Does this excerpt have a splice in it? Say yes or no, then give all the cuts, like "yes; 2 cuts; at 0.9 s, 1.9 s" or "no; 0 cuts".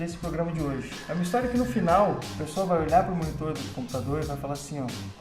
yes; 1 cut; at 1.5 s